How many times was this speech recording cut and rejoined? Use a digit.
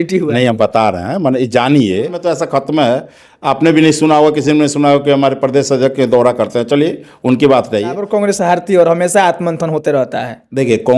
2